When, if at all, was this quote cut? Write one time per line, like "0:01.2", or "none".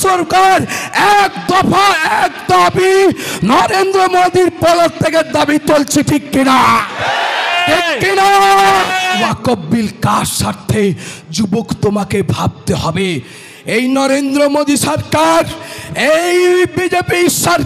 0:09.2